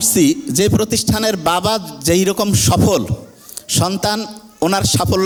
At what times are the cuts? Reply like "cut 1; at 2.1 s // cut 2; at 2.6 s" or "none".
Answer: none